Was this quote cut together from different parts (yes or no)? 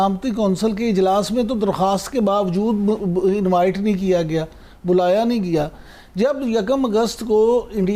no